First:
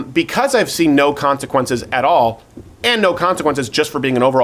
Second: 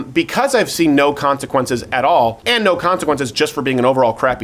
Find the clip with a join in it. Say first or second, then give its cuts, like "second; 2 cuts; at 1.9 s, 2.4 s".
second; 1 cut; at 2.4 s